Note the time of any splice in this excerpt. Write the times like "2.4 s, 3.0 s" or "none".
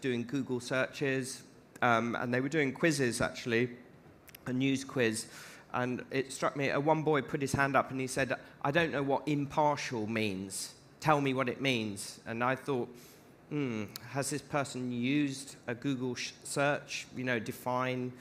none